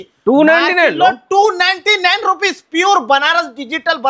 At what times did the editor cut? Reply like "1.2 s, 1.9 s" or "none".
none